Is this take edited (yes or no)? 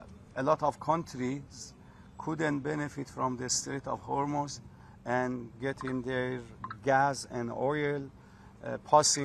no